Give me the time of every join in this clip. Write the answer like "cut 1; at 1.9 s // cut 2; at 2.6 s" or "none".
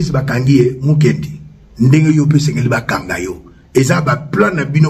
none